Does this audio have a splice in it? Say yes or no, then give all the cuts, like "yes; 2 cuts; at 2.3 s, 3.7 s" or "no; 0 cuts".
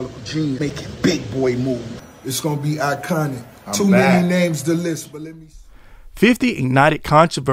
yes; 2 cuts; at 1.9 s, 5.1 s